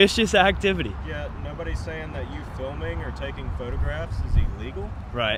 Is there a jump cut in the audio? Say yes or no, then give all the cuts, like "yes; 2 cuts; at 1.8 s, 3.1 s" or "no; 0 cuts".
no; 0 cuts